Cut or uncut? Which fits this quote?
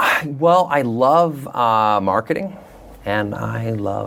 uncut